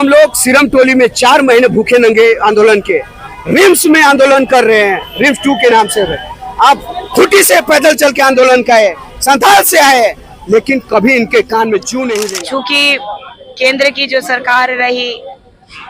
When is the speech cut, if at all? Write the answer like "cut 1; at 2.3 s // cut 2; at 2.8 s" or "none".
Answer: cut 1; at 12.3 s